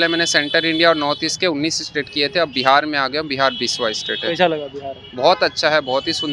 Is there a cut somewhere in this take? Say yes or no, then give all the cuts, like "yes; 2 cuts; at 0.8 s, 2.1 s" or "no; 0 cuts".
no; 0 cuts